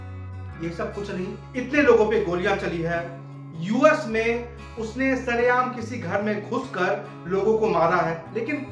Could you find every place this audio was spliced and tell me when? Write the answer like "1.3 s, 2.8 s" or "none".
1.5 s